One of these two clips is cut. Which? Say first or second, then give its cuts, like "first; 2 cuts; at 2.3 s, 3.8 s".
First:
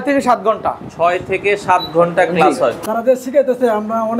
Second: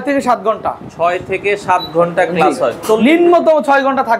first; 1 cut; at 2.8 s